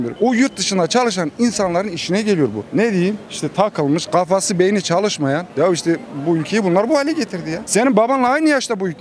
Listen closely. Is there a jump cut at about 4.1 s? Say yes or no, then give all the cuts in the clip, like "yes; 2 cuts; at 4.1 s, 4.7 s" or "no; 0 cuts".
no; 3 cuts; at 2.6 s, 5.5 s, 7.6 s